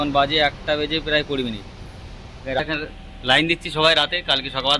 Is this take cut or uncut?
cut